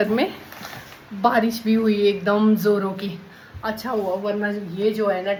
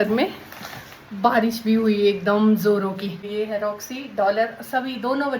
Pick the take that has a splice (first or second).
second